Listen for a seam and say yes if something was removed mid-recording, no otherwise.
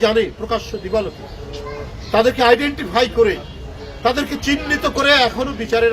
no